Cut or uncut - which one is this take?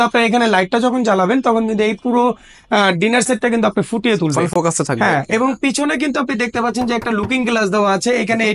uncut